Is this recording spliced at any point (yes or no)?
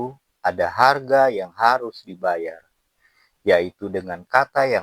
no